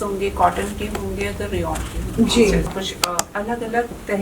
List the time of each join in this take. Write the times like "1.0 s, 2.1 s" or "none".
2.7 s